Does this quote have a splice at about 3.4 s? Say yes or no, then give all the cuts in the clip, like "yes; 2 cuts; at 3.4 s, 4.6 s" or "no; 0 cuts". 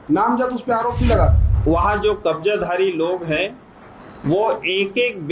no; 1 cut; at 1.5 s